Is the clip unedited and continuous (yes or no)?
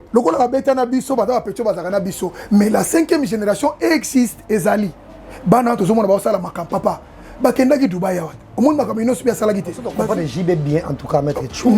no